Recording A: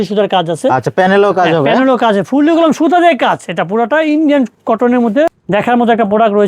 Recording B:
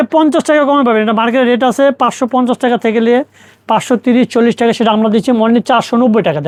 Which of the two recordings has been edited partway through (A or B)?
A